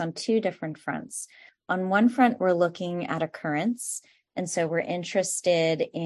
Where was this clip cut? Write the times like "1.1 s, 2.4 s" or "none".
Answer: none